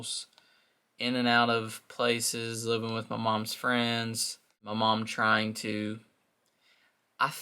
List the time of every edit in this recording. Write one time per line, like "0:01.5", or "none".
0:04.7

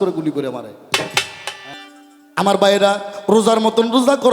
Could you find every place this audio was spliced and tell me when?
0:01.7

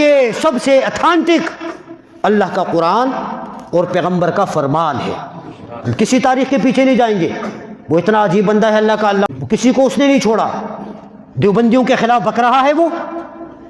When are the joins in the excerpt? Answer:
0:09.3

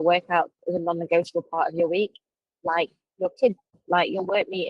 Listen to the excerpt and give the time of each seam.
0:03.7

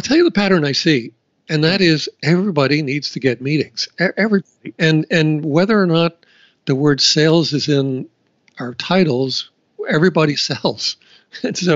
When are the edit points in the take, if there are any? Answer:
none

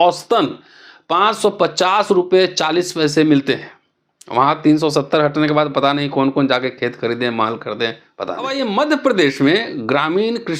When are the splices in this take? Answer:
0:08.5

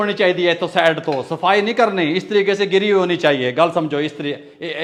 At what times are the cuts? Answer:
none

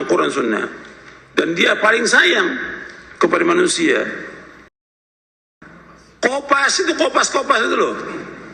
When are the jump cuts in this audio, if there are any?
0:05.3

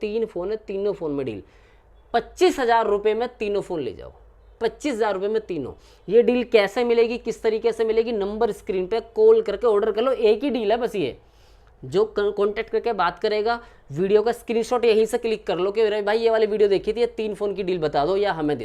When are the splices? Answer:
none

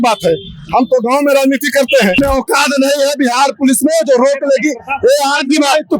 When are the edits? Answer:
0:02.2

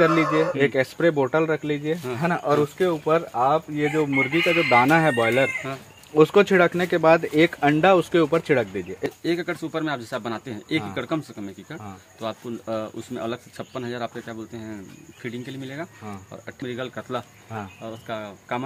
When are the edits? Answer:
0:09.0
0:16.6

